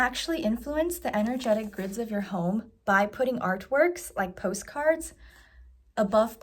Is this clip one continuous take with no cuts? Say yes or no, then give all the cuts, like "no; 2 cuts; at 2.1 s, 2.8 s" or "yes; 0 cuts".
yes; 0 cuts